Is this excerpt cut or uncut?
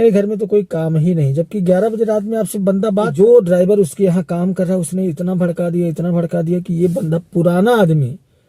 cut